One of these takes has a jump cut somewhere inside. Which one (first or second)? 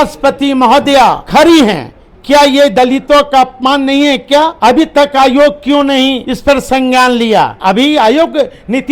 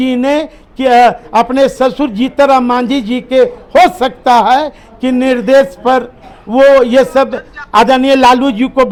first